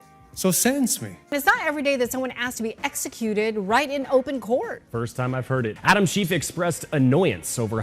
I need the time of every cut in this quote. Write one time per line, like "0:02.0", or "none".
0:01.3
0:05.8